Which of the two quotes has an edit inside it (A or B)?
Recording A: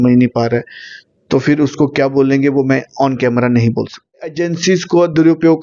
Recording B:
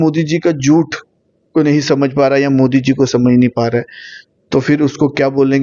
A